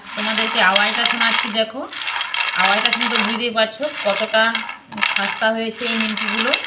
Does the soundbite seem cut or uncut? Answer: uncut